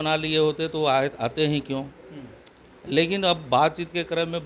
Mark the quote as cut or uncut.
uncut